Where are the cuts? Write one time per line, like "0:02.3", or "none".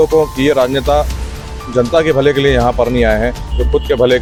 none